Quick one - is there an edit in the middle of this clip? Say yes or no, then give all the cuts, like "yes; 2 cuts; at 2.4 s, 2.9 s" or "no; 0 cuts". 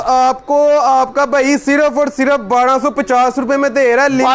no; 0 cuts